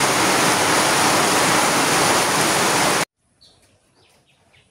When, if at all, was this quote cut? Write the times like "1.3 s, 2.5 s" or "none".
3.0 s